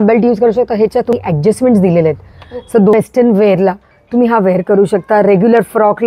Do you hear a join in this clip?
yes; 2 cuts; at 1.1 s, 2.9 s

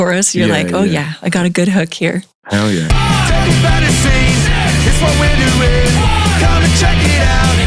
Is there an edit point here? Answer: yes; 1 cut; at 2.9 s

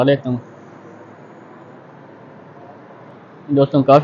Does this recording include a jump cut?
yes; 1 cut; at 3.1 s

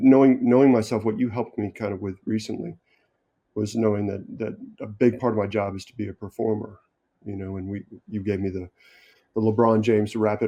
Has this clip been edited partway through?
no; 0 cuts

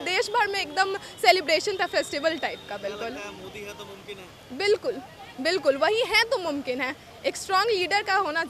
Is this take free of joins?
yes; 0 cuts

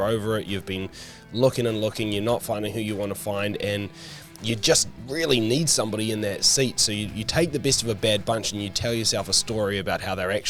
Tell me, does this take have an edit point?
no; 0 cuts

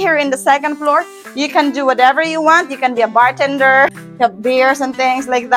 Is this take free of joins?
yes; 0 cuts

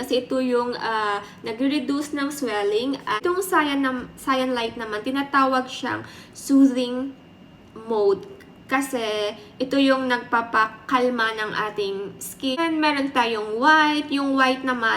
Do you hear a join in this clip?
yes; 2 cuts; at 3.2 s, 12.6 s

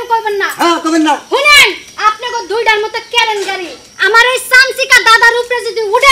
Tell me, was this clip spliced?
no; 0 cuts

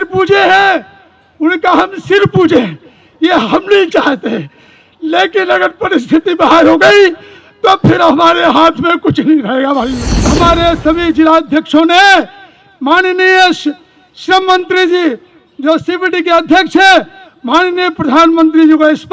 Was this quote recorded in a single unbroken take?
no; 1 cut; at 10.3 s

